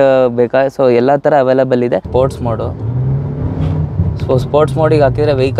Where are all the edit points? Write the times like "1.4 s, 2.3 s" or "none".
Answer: 2.1 s